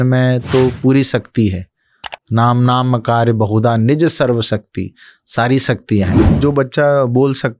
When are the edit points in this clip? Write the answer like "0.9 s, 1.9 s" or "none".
6.3 s